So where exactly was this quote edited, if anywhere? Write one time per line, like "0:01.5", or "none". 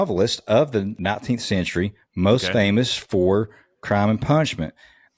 0:00.9

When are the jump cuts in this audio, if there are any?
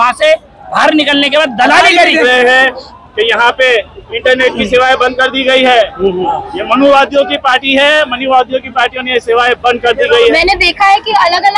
0:02.2
0:10.3

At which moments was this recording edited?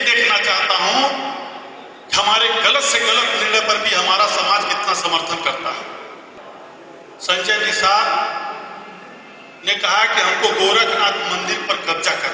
0:06.4

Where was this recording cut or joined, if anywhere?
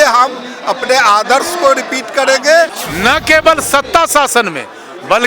0:02.7

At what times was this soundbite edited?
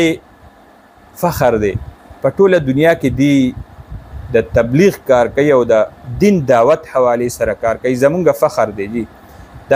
none

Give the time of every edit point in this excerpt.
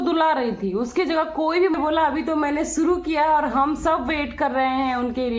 0:01.7

